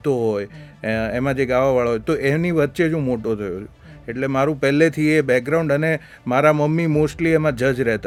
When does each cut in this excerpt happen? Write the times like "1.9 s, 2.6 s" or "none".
none